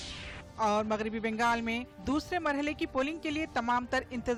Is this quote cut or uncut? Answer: uncut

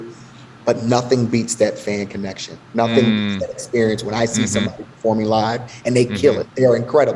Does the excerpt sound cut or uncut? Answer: uncut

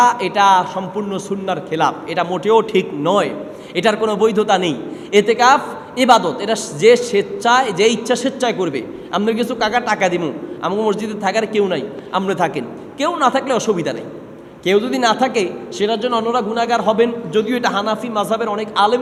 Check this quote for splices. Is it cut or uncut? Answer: uncut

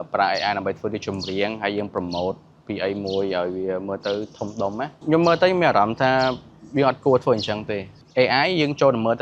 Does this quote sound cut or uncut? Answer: cut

